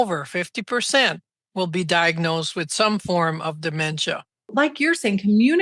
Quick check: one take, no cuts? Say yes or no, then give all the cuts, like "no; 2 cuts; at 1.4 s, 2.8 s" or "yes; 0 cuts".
no; 1 cut; at 4.5 s